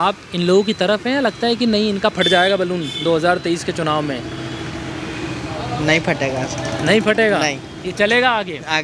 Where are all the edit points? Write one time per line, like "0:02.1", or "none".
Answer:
none